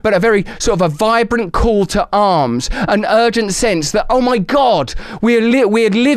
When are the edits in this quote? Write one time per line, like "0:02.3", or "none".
none